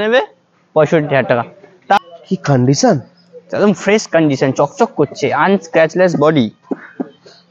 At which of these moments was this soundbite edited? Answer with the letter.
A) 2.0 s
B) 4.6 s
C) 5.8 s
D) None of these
A